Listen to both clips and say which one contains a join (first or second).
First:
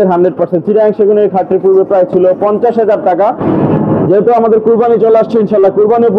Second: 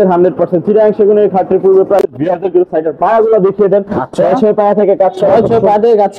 second